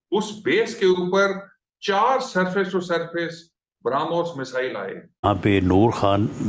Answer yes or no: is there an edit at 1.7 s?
no